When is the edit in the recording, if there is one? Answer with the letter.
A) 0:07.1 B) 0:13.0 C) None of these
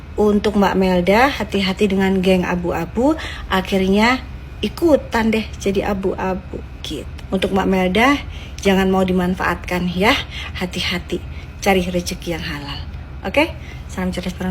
A